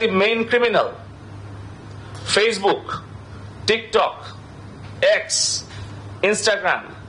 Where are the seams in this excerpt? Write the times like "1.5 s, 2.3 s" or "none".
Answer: none